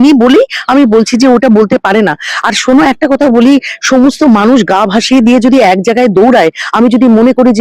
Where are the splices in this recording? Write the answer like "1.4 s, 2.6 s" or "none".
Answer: none